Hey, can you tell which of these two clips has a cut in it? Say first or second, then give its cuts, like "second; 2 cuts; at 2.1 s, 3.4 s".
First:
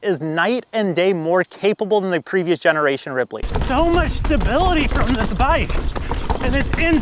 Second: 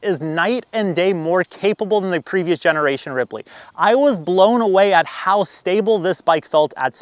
first; 1 cut; at 3.5 s